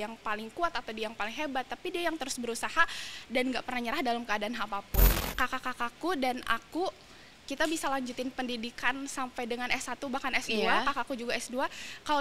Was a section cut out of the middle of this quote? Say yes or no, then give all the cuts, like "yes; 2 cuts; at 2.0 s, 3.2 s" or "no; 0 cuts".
yes; 1 cut; at 5.1 s